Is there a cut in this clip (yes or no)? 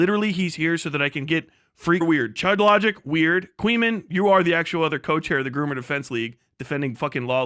yes